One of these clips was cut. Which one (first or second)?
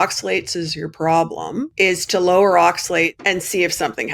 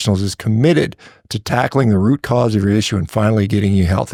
first